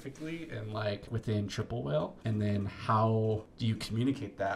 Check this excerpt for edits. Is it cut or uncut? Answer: cut